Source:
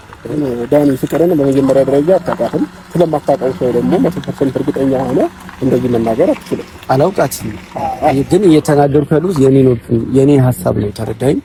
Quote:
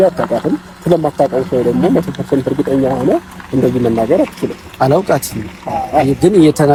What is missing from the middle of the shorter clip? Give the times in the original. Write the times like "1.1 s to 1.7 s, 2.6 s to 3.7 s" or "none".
none